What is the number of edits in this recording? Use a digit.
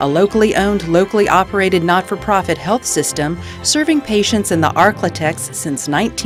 0